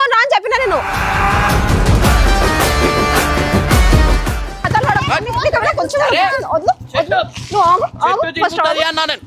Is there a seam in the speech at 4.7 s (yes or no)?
yes